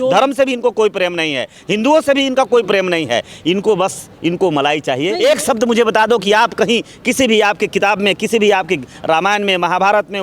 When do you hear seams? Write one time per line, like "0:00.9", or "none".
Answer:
0:05.1

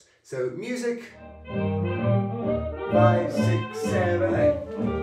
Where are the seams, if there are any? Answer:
0:01.4

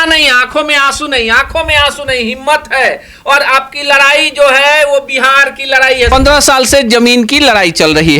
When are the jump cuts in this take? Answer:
0:06.1

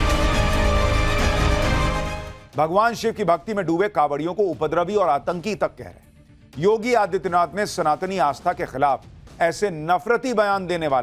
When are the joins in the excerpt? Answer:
0:02.1

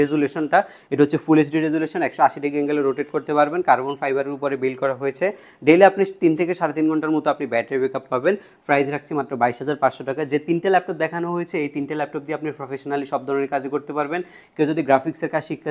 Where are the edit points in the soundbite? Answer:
none

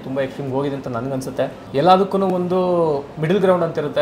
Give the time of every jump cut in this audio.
0:01.6
0:03.1

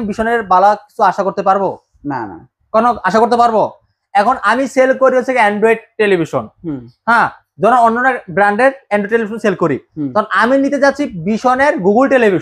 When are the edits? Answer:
none

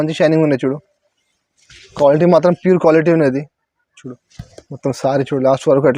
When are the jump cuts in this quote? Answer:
none

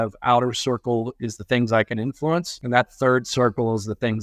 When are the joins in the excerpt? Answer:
0:02.6

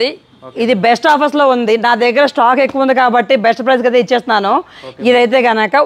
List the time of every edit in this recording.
none

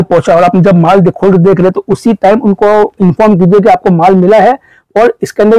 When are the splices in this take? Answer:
none

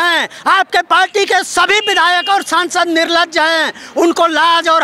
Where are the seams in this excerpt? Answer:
none

